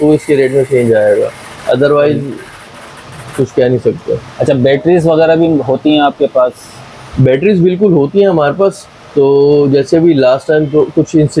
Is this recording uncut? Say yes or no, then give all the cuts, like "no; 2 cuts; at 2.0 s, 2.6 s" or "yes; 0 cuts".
yes; 0 cuts